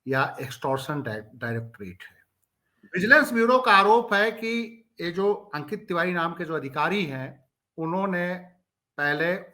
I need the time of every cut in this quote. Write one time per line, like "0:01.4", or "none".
0:02.8